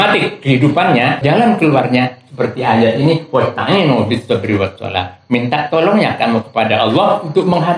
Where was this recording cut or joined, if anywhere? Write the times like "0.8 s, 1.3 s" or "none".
1.2 s